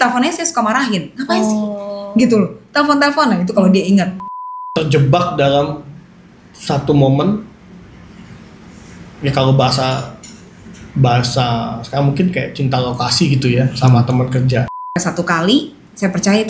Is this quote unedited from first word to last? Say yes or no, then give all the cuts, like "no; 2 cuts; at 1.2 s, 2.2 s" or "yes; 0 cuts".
no; 2 cuts; at 4.6 s, 14.9 s